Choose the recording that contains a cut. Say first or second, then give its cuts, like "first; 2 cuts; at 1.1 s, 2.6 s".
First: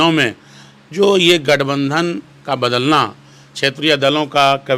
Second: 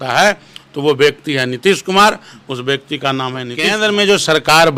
second; 1 cut; at 3.5 s